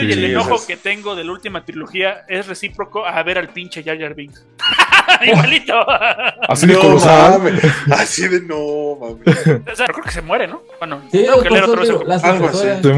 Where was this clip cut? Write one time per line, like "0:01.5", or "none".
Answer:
0:09.9

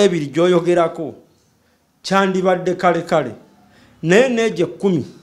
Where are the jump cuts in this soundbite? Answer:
none

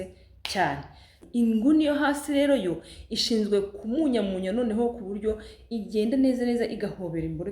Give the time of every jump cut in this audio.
0:01.2

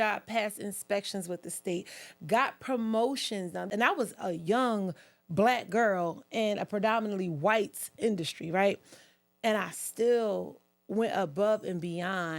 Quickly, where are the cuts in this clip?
0:03.7

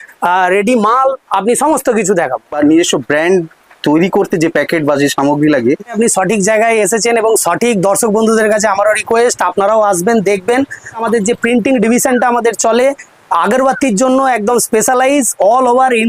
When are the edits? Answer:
0:02.5
0:05.9
0:11.0

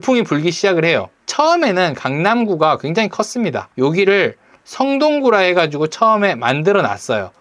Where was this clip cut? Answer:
0:01.2
0:03.6

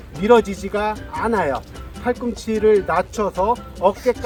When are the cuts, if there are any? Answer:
none

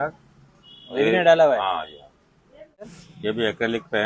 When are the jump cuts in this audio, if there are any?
0:03.0

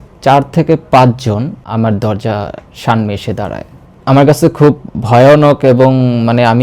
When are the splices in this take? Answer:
0:01.6
0:03.9

